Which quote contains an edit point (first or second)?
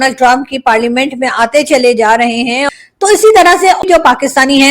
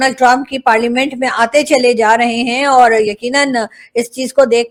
first